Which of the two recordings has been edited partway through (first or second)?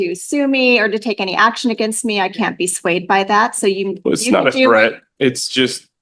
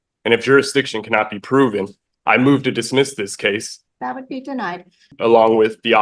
second